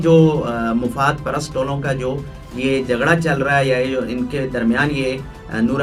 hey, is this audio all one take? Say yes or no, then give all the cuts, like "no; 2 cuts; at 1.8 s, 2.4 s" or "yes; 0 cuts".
yes; 0 cuts